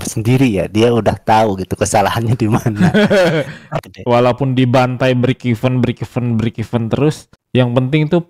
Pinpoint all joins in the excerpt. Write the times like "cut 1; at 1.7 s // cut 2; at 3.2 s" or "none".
cut 1; at 3.7 s